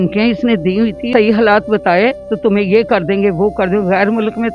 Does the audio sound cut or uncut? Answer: cut